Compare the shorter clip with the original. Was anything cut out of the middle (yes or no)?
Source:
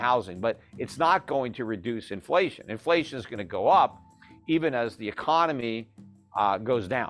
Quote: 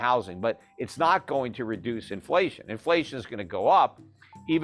no